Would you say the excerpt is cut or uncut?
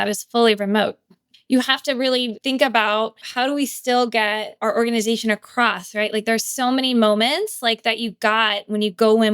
cut